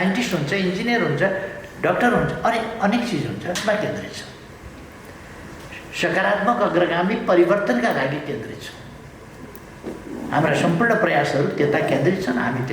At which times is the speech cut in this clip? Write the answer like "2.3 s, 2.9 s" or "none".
3.6 s